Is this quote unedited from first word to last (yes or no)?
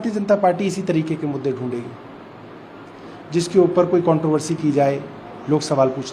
yes